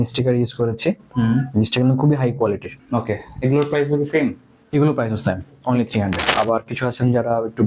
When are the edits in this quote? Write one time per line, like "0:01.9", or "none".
0:02.7
0:06.2